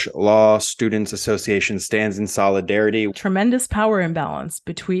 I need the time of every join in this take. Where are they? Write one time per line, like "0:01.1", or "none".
0:03.1